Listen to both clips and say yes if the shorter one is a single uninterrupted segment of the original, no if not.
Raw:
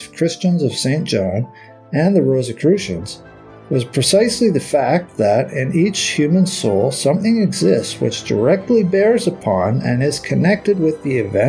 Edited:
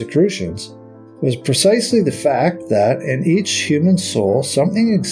yes